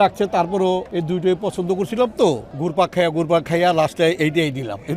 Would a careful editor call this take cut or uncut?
cut